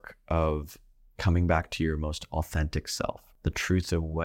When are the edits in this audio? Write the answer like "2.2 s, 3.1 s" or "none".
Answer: 3.3 s